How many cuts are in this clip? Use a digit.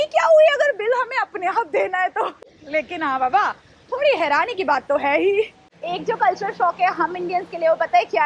0